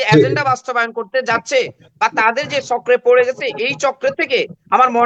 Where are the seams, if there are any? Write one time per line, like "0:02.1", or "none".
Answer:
none